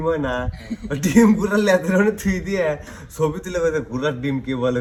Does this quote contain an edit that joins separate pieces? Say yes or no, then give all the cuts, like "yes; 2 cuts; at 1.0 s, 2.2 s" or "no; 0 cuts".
no; 0 cuts